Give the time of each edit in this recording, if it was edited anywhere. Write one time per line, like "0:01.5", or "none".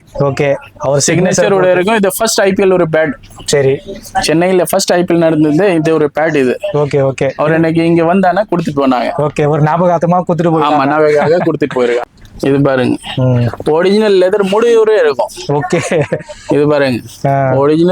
0:12.1